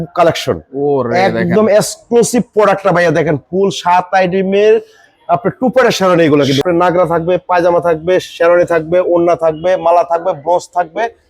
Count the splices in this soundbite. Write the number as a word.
one